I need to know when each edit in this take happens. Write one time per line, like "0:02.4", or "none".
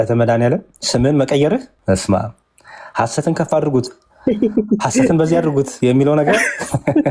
0:01.7